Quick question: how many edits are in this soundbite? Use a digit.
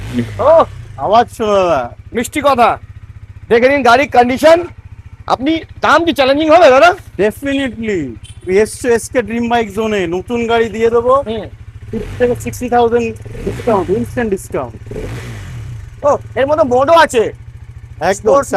0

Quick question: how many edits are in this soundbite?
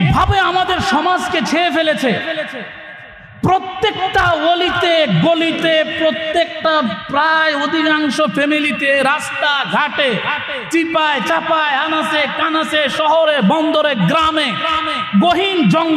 0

